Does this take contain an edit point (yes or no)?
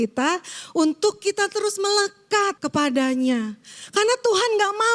yes